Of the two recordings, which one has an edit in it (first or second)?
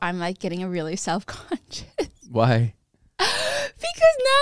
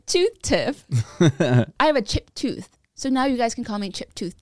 second